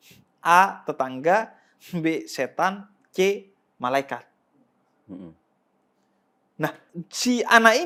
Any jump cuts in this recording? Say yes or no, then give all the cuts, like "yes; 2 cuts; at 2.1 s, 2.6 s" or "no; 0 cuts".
no; 0 cuts